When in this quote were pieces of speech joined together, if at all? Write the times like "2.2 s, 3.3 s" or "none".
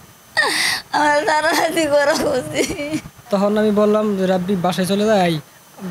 3.1 s